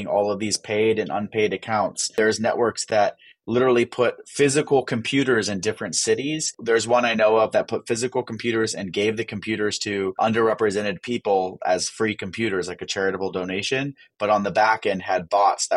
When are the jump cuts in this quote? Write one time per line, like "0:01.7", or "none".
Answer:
0:02.1
0:06.5
0:10.2

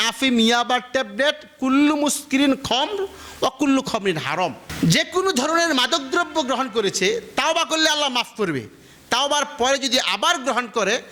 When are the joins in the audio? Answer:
none

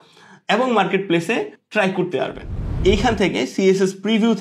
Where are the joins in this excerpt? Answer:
0:01.6
0:02.7

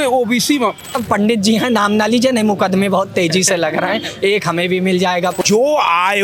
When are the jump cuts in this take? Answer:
0:01.0
0:05.4

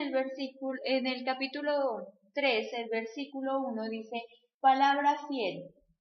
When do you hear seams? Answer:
0:04.4

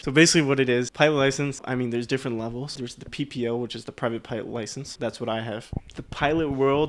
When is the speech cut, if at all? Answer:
0:00.9
0:01.6
0:02.7
0:04.9
0:05.7

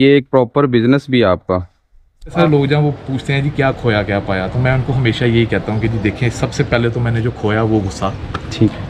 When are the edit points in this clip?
0:02.3

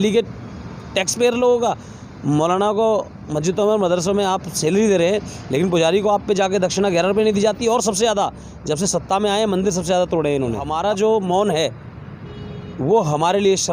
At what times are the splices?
0:10.7

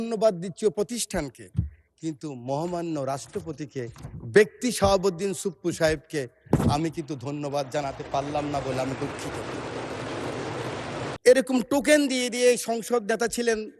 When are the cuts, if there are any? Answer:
0:11.2

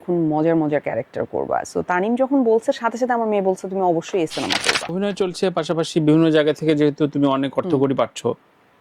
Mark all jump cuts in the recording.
0:05.0

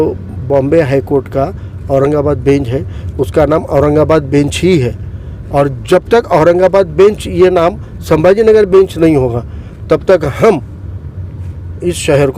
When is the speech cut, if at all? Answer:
none

